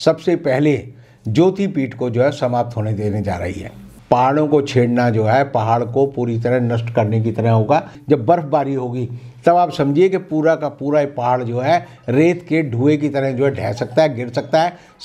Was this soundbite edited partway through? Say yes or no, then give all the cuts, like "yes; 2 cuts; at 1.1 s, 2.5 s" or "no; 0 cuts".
yes; 2 cuts; at 3.8 s, 8.0 s